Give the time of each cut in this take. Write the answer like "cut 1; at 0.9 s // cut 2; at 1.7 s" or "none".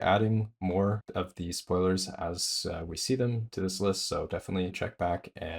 cut 1; at 1.0 s // cut 2; at 4.7 s